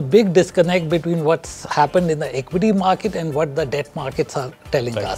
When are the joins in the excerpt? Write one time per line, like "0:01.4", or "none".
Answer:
none